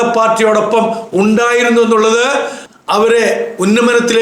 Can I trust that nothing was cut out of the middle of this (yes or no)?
no